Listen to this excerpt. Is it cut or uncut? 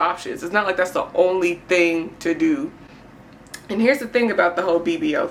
uncut